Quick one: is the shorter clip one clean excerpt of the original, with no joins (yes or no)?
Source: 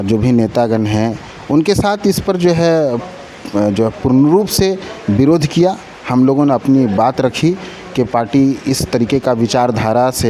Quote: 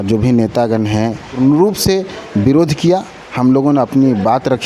no